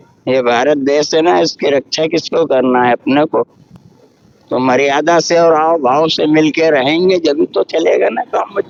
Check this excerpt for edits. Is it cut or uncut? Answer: uncut